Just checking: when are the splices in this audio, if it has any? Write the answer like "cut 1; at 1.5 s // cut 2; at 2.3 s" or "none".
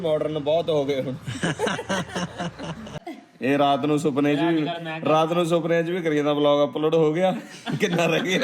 cut 1; at 2.9 s